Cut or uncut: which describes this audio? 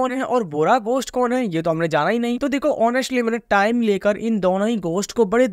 uncut